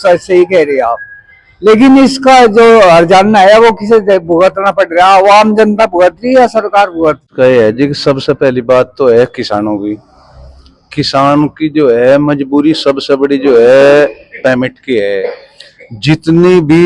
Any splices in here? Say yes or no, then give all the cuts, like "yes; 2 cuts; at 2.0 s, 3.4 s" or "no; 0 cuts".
yes; 1 cut; at 7.3 s